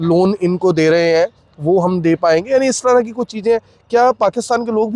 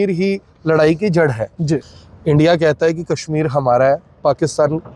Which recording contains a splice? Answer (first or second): second